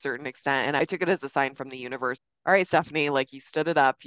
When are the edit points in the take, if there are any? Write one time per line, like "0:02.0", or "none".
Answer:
0:00.8
0:02.2